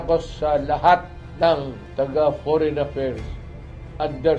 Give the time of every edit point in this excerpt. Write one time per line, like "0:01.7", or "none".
0:01.8